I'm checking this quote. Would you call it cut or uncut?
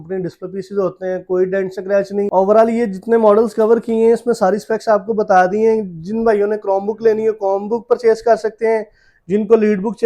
cut